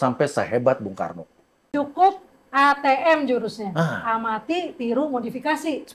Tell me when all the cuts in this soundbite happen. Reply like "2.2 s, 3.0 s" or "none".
1.7 s

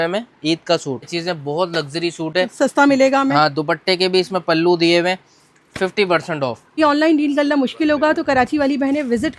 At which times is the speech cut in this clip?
1.0 s, 6.8 s

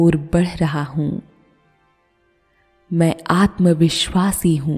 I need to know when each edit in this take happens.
none

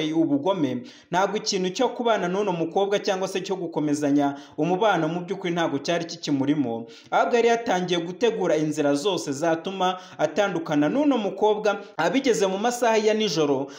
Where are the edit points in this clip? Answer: 11.9 s

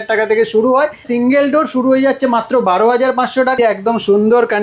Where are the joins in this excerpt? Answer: 1.0 s, 3.6 s

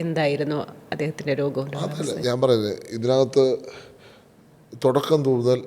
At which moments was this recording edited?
none

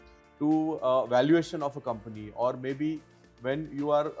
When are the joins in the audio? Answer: none

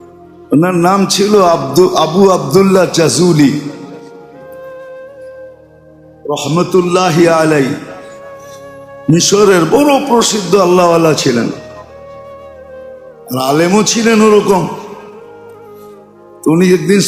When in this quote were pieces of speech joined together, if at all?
4.0 s, 5.6 s, 11.6 s, 13.2 s

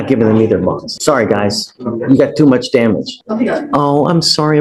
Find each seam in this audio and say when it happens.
0.9 s, 3.2 s

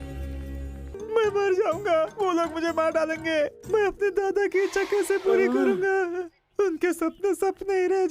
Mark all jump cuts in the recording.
1.0 s

